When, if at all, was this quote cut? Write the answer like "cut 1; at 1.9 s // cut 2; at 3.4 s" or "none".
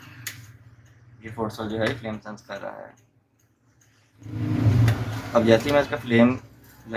cut 1; at 4.3 s